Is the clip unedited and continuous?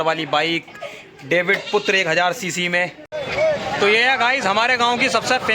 no; 1 cut; at 3.2 s

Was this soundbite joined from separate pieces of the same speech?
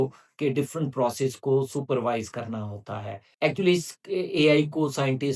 yes; 1 cut; at 3.3 s

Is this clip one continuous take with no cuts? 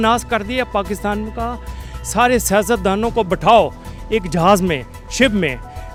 yes; 0 cuts

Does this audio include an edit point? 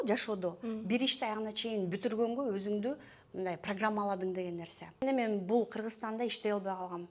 yes; 1 cut; at 5.0 s

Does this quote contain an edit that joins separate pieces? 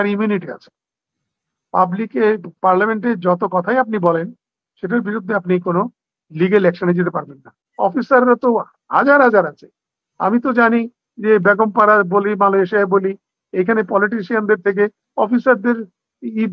yes; 1 cut; at 7.6 s

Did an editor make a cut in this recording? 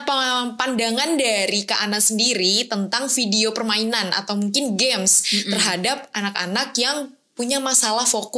no; 0 cuts

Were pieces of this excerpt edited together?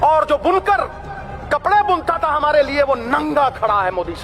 no; 0 cuts

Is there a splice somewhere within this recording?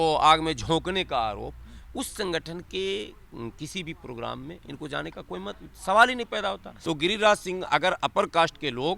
yes; 1 cut; at 6.7 s

